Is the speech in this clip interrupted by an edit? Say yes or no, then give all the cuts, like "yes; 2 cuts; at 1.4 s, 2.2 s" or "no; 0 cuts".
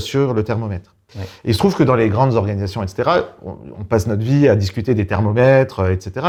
no; 0 cuts